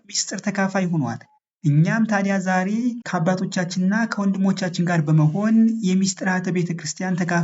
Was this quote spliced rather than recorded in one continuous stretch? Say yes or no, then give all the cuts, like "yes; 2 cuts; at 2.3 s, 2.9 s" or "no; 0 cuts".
yes; 1 cut; at 3.0 s